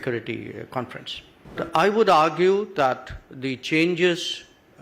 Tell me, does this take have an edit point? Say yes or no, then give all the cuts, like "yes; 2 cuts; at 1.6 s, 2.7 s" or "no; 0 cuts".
yes; 1 cut; at 1.6 s